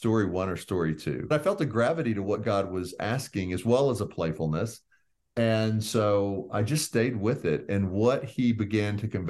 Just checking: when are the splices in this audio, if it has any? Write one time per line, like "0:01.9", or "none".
0:01.3